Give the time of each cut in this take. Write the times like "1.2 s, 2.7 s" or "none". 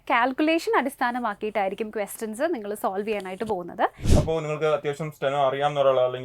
4.1 s